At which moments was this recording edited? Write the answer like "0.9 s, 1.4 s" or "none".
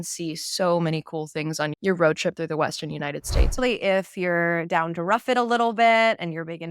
3.5 s